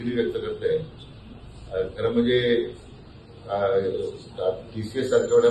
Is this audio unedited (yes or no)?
yes